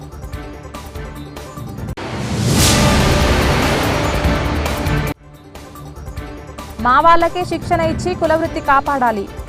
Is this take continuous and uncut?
no; 2 cuts; at 1.9 s, 6.1 s

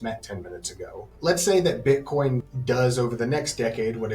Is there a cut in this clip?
yes; 2 cuts; at 1.0 s, 2.5 s

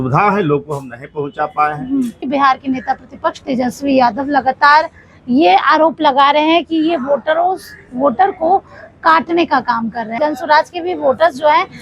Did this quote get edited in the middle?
yes; 2 cuts; at 2.2 s, 10.1 s

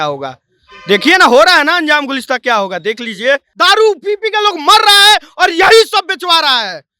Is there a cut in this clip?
yes; 1 cut; at 3.5 s

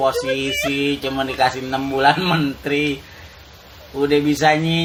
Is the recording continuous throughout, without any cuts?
yes; 0 cuts

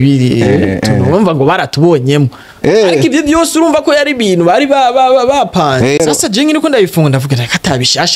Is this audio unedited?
no; 1 cut; at 6.0 s

